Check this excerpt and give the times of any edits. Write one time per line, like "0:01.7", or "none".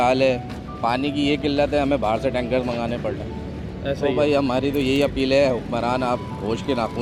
none